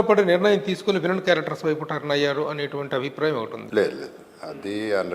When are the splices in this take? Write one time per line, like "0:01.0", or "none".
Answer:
0:03.6